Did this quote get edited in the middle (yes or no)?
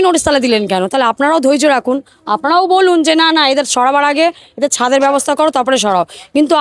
no